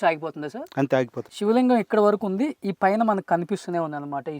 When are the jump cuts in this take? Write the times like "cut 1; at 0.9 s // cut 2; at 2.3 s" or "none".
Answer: cut 1; at 1.2 s

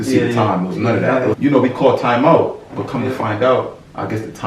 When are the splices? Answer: cut 1; at 1.3 s

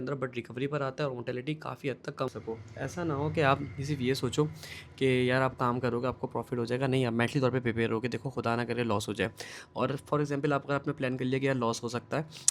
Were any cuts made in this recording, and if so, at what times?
cut 1; at 2.3 s

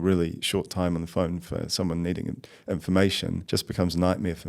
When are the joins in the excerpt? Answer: cut 1; at 3.4 s

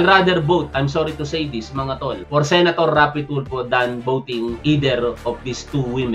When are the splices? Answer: cut 1; at 2.2 s // cut 2; at 4.6 s

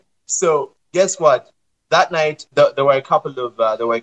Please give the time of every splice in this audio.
cut 1; at 2.4 s

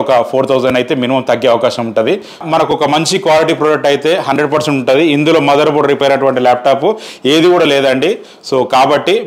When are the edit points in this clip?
cut 1; at 2.4 s

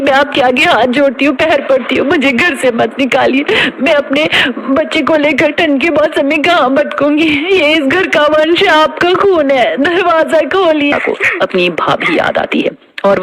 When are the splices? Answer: cut 1; at 10.9 s

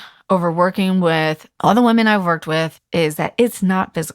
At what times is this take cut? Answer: cut 1; at 1.5 s // cut 2; at 2.8 s

